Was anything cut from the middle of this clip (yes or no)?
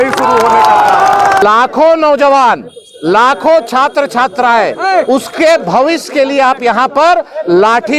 yes